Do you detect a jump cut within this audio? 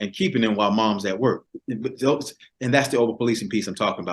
yes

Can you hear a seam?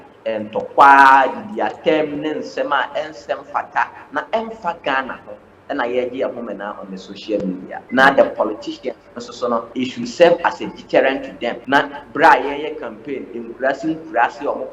yes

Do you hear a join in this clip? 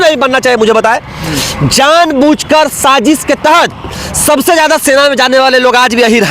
no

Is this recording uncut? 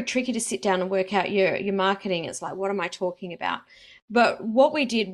yes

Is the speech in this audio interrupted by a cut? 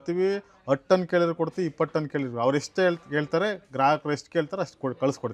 no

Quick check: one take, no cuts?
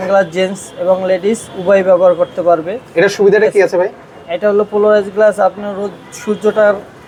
yes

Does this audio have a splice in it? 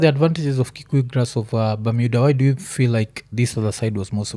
no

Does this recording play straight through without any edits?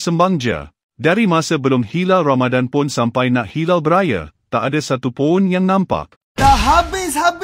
no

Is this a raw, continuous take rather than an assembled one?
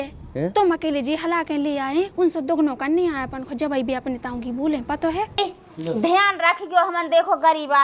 no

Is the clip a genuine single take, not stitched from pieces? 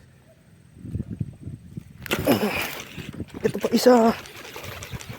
no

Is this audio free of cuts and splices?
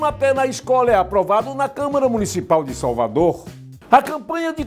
no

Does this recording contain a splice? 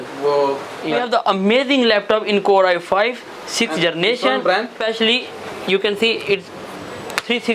yes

